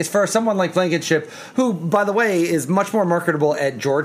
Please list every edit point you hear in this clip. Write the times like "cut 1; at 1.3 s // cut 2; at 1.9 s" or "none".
none